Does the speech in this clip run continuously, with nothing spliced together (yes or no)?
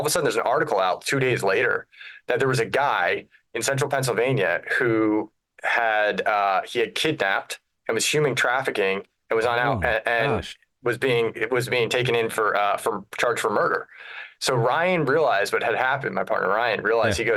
yes